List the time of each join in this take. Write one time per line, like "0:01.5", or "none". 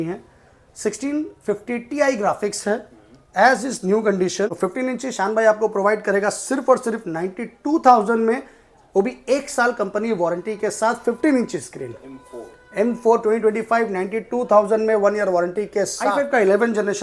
0:04.5
0:16.0